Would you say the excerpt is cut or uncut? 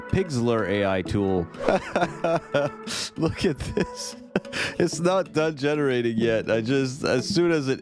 cut